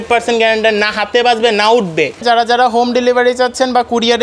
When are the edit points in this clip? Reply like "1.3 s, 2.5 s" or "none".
2.2 s